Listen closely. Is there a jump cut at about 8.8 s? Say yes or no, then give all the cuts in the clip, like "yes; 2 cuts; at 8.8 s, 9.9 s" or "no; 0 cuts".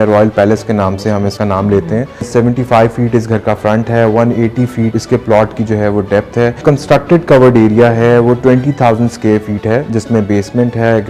no; 4 cuts; at 1.3 s, 2.3 s, 4.9 s, 6.6 s